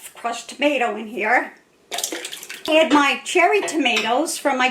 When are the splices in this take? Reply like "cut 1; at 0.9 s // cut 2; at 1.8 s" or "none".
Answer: cut 1; at 2.7 s